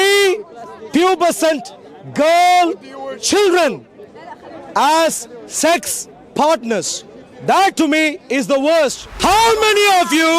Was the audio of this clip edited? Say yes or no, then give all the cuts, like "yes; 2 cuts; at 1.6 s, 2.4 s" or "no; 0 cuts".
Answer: yes; 1 cut; at 9.1 s